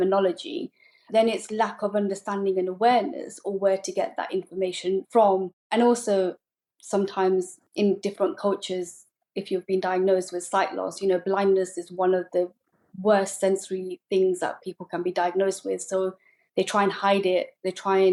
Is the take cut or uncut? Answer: uncut